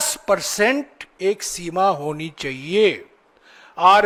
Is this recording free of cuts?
yes; 0 cuts

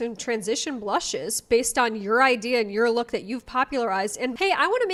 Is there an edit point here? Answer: no; 0 cuts

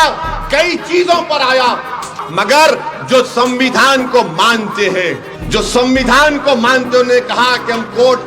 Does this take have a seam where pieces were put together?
yes; 2 cuts; at 2.2 s, 5.3 s

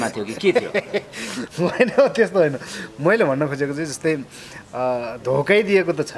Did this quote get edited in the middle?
no; 0 cuts

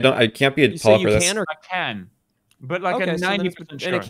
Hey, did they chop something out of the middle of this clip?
yes; 1 cut; at 1.6 s

